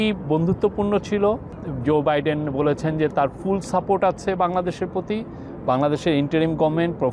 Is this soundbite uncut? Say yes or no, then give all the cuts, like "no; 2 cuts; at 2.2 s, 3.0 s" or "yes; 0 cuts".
yes; 0 cuts